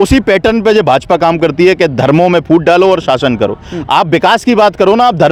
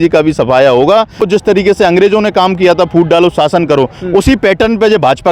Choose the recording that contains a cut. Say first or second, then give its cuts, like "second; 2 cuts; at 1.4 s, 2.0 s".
second; 1 cut; at 1.2 s